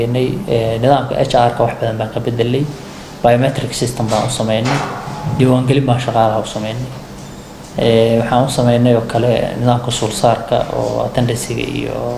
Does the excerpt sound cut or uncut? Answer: uncut